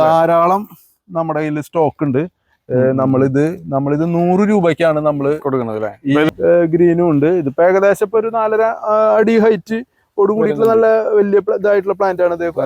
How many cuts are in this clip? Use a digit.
1